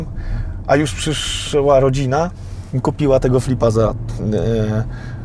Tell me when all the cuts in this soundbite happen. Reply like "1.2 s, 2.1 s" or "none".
none